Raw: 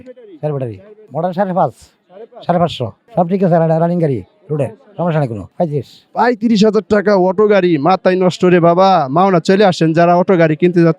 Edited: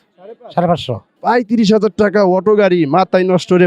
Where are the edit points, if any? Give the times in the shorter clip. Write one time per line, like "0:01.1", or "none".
0:01.1